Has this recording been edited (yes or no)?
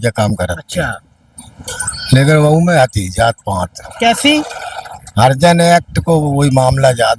no